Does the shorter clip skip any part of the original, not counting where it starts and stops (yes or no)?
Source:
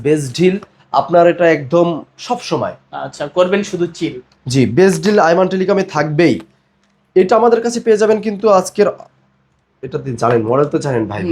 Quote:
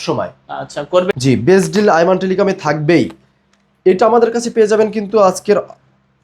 yes